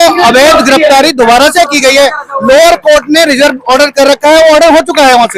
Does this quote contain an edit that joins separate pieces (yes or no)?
no